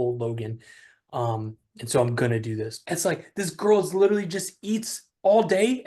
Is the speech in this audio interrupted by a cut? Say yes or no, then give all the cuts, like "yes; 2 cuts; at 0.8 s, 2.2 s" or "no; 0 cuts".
yes; 1 cut; at 2.8 s